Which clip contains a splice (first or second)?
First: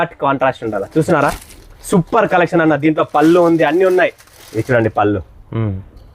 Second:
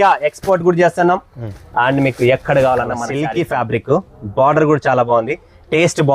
second